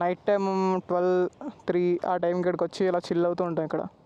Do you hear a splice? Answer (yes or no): no